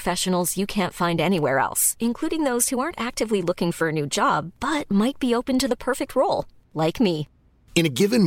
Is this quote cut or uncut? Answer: uncut